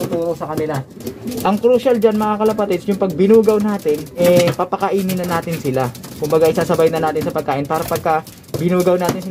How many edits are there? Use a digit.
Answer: 2